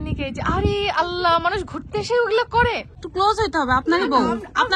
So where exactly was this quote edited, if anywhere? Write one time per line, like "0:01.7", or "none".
0:02.9